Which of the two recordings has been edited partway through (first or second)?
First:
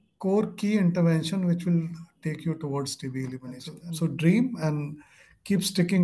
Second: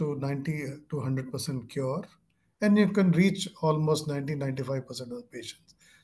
first